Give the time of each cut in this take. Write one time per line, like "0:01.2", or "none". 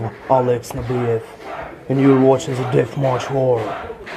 none